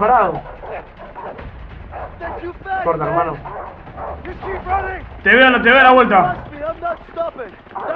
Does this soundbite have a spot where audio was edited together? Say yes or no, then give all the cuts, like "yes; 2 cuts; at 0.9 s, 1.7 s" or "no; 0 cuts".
no; 0 cuts